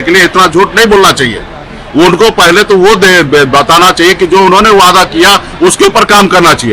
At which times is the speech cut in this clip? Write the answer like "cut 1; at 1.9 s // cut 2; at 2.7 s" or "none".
none